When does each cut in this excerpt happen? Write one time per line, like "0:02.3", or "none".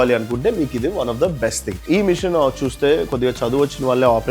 0:01.7